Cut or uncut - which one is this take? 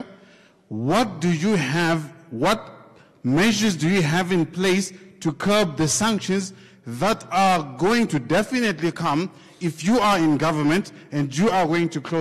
uncut